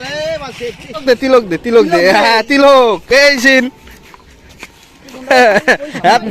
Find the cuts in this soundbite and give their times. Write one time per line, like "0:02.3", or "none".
0:01.0